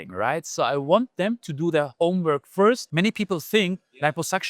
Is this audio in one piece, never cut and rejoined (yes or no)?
no